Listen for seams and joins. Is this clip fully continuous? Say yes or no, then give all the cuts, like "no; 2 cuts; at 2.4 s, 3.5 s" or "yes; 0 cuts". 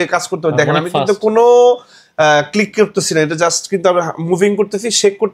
yes; 0 cuts